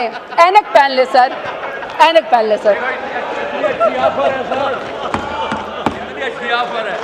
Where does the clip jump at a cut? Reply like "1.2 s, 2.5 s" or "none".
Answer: none